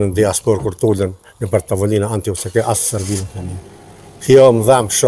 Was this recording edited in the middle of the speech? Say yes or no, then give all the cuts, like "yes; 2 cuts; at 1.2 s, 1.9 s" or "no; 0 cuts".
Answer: no; 0 cuts